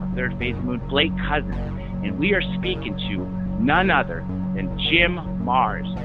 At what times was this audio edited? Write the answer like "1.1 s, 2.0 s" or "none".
none